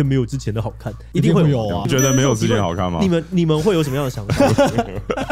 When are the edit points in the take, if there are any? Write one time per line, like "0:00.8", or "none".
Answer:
0:01.8